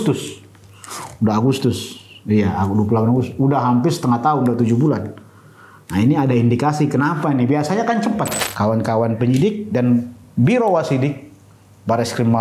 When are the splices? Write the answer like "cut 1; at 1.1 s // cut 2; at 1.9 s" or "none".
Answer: cut 1; at 8.4 s